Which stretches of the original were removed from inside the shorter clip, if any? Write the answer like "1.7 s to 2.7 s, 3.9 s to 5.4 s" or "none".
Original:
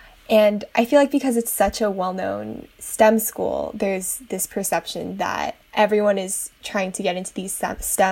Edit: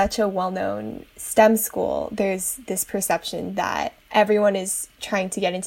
none